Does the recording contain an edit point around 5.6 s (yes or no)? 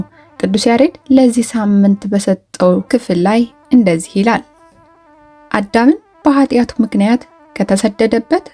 no